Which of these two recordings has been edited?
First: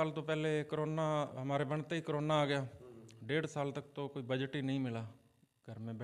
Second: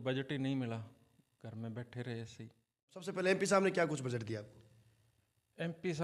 second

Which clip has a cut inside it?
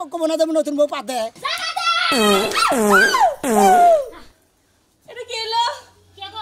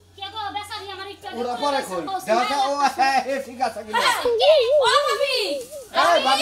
first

